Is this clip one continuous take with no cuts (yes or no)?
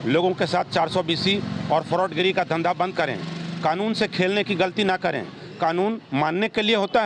yes